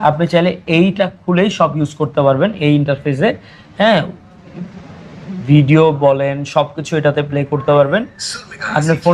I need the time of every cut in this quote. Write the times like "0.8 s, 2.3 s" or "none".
none